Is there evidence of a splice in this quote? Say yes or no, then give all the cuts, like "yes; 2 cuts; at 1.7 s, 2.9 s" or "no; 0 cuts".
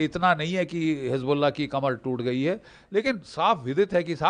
no; 0 cuts